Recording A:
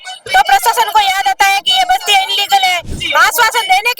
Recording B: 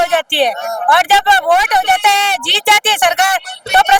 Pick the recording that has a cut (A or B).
A